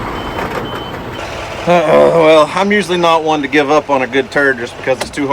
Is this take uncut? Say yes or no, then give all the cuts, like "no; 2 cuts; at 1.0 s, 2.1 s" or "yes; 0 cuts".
no; 1 cut; at 1.2 s